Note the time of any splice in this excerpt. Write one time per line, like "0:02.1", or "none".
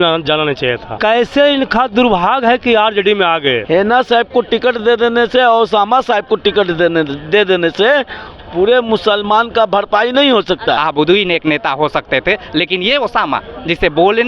0:00.9
0:03.6
0:10.8